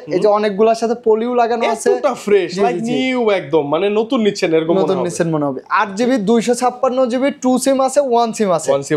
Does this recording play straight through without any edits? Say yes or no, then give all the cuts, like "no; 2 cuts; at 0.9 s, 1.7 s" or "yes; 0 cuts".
yes; 0 cuts